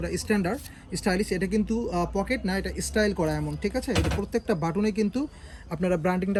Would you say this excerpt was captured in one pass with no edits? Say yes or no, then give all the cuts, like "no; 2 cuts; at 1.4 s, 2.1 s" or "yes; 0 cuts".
yes; 0 cuts